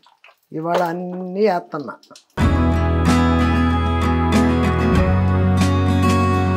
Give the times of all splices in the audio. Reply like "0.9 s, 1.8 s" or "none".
none